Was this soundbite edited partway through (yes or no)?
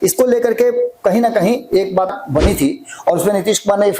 yes